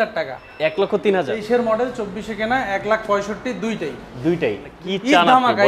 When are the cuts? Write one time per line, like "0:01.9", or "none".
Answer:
0:01.4
0:04.7